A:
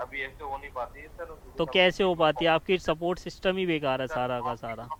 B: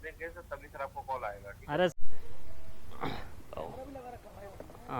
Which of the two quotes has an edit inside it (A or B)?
B